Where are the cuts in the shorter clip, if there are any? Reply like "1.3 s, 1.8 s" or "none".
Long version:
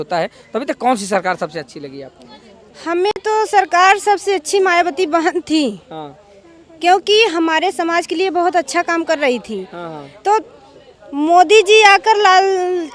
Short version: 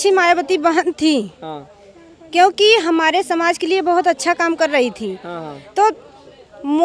none